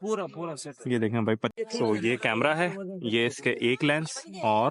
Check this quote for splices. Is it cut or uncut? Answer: cut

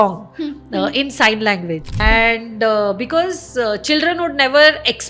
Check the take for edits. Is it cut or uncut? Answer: cut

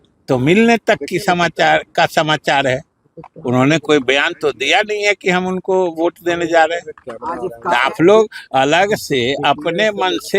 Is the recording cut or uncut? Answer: uncut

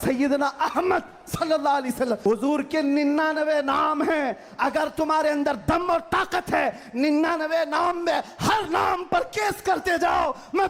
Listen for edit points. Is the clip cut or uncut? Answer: cut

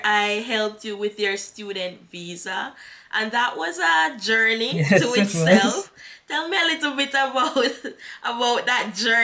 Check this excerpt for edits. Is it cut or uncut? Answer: uncut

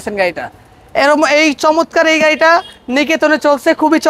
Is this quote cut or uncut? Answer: uncut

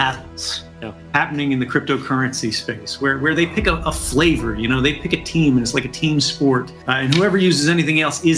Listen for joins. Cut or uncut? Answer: cut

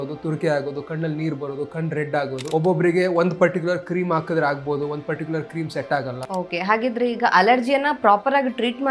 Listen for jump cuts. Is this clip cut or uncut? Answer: cut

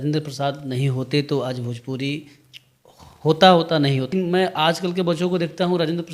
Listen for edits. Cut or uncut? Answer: cut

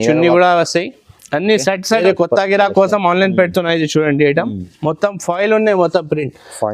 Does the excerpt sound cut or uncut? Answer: cut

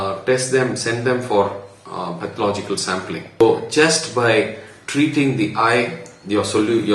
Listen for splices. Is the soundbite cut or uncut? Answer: cut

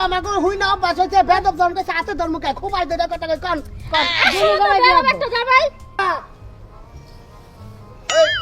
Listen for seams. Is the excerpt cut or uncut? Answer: cut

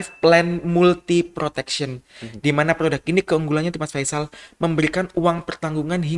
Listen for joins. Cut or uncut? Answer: uncut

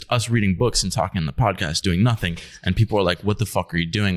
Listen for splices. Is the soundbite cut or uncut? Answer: uncut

